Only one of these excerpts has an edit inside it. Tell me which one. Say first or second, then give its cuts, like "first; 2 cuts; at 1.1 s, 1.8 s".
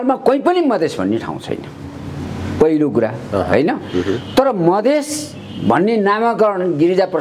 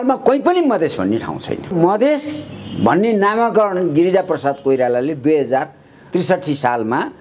second; 1 cut; at 1.7 s